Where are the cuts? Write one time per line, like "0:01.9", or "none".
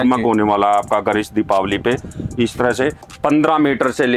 none

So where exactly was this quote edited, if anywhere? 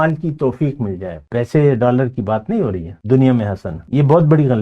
0:01.1
0:02.9
0:03.7

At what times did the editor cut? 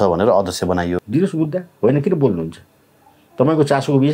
0:01.0

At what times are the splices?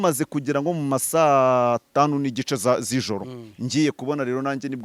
none

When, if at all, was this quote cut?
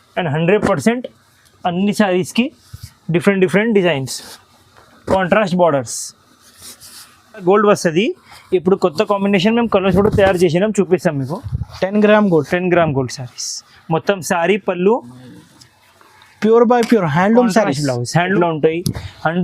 0:07.4
0:18.3

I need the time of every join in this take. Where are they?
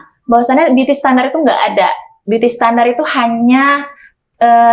none

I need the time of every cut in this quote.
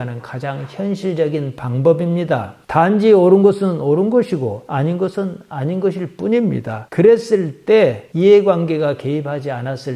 0:02.5

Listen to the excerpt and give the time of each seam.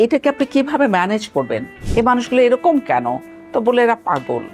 0:01.8

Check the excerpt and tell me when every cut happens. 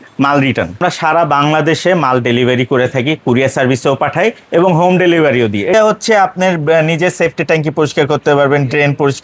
0:00.8
0:05.7

